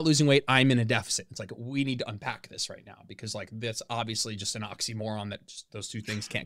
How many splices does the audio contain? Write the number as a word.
zero